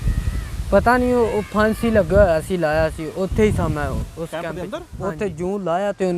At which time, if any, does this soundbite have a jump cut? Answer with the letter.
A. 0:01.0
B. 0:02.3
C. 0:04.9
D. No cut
C